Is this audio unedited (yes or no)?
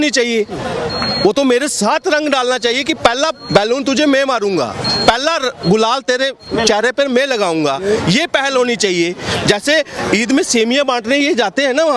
yes